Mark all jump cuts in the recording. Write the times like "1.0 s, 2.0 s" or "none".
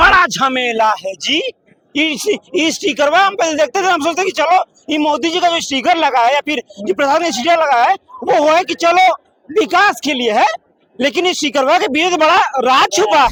none